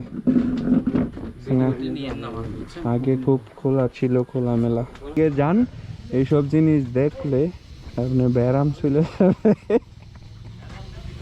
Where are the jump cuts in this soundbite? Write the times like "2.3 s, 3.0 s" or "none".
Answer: 5.2 s